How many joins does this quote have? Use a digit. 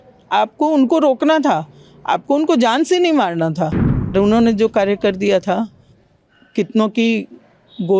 1